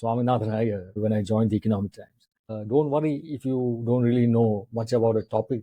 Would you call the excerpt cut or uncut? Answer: cut